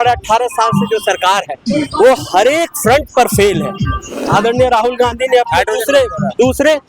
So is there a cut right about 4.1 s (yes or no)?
yes